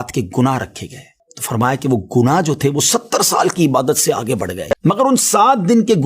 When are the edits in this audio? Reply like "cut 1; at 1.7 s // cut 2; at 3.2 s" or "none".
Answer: cut 1; at 4.6 s